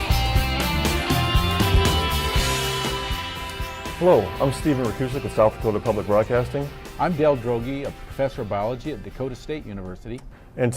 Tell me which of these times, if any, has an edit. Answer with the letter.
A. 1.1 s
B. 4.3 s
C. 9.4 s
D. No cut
B